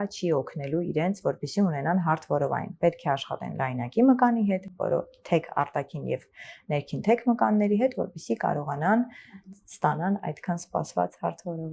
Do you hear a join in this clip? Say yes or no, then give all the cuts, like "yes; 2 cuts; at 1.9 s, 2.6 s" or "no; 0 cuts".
no; 0 cuts